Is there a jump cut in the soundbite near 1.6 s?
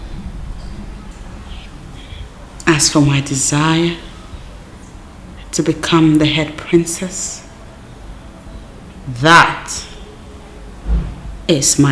yes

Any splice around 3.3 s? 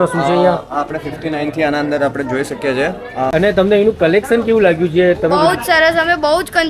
yes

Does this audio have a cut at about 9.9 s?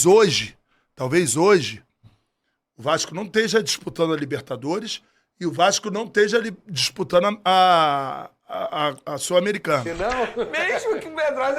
yes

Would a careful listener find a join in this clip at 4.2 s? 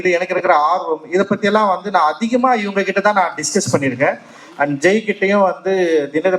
no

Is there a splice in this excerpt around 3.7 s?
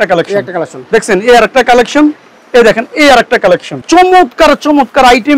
yes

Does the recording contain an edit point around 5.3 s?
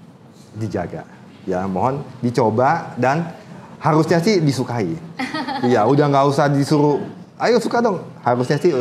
no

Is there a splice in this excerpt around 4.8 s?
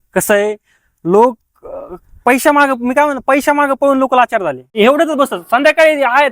yes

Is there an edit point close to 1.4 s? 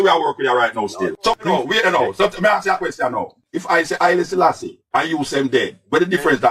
yes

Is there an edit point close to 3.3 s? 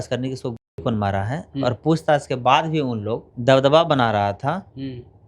yes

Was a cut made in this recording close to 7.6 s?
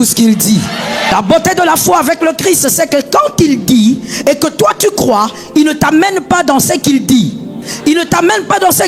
yes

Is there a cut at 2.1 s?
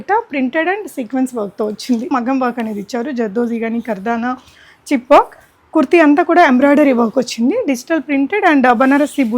yes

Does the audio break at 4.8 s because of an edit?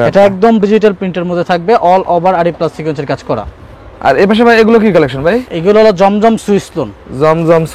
no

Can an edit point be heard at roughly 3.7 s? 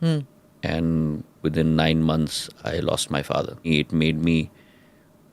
yes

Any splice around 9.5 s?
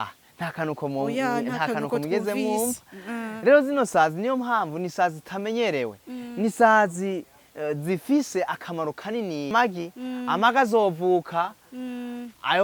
yes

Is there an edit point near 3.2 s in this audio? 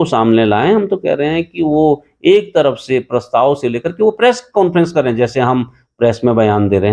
no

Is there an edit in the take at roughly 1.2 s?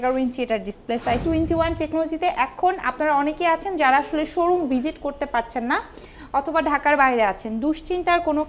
yes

